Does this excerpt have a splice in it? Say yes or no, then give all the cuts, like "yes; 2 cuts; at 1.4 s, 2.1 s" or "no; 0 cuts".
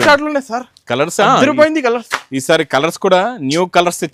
no; 0 cuts